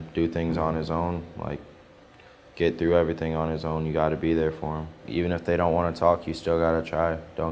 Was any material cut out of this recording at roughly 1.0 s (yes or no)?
no